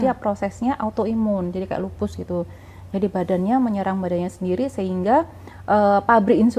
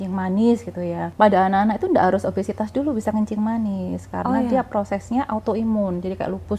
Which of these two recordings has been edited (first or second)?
second